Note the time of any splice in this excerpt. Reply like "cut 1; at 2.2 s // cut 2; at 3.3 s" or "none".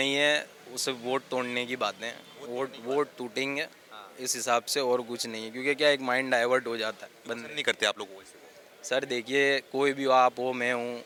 none